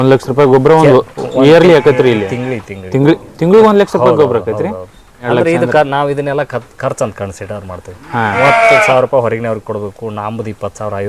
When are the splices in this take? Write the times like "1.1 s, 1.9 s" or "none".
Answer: 5.2 s, 8.4 s